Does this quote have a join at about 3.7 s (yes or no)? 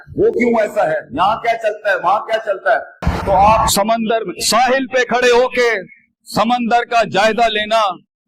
yes